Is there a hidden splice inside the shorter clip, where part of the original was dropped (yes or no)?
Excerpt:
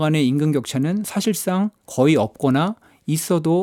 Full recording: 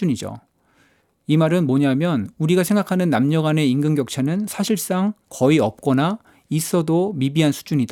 no